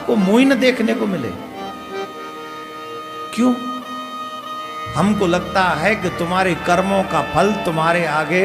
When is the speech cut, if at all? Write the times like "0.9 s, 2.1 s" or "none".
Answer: none

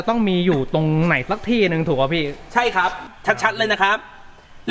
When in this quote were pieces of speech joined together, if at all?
3.0 s

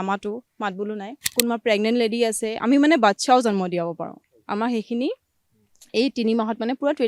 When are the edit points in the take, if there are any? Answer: 1.2 s

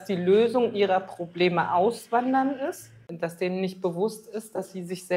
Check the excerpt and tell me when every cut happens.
3.1 s

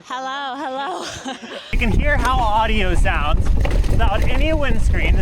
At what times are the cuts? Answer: 1.7 s

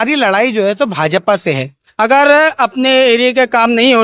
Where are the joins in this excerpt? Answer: 1.8 s

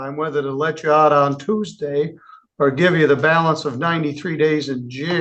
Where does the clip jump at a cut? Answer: none

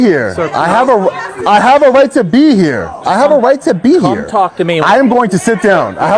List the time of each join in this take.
none

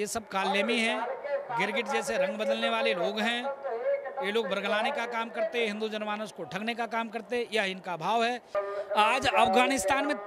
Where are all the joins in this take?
8.5 s

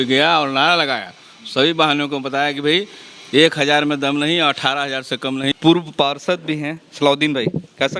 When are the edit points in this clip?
5.5 s

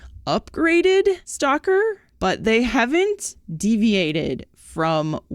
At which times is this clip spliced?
1.3 s, 2.1 s

